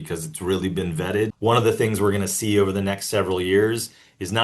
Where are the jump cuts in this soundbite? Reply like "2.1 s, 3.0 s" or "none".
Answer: 1.3 s